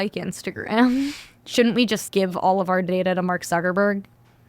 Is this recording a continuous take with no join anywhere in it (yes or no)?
no